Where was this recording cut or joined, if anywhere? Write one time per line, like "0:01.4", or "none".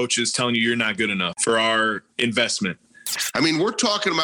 0:01.3
0:03.1